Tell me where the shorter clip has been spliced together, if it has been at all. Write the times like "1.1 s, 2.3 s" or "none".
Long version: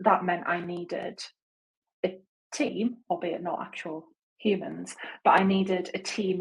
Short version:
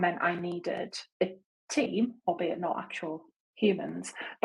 1.0 s